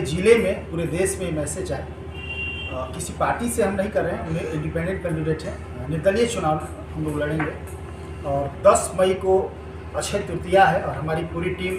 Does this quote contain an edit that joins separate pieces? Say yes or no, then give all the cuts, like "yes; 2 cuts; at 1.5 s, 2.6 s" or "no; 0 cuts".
no; 0 cuts